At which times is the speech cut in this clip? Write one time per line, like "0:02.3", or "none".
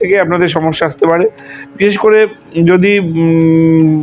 none